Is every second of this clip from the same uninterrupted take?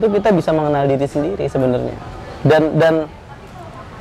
yes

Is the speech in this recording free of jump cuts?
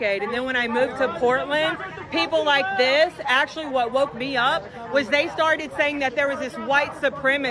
yes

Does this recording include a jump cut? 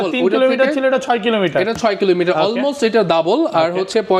no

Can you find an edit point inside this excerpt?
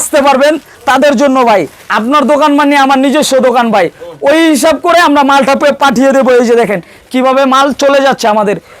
no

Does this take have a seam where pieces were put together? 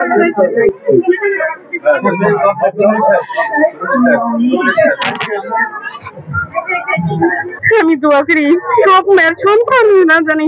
no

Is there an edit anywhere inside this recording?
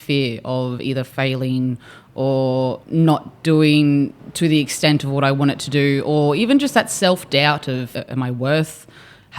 yes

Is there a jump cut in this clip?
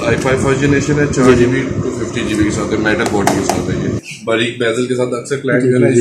yes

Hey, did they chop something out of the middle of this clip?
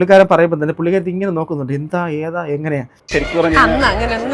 yes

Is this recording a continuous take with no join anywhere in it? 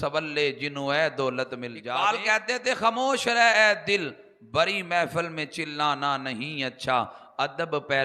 no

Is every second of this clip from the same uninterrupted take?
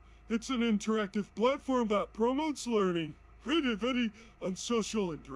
yes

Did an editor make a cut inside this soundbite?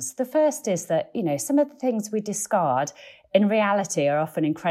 no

